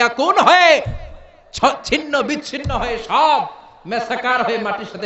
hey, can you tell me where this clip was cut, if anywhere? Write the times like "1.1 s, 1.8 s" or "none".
none

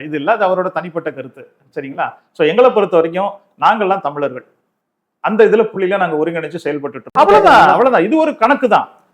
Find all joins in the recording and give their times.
7.1 s

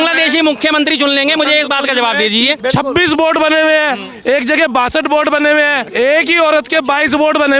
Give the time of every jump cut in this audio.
2.6 s, 5.9 s

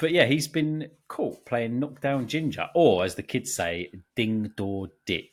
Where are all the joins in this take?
none

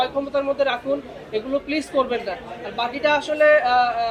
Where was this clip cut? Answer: none

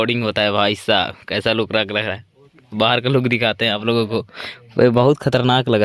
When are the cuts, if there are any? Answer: none

